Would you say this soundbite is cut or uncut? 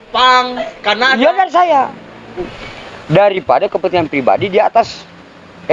cut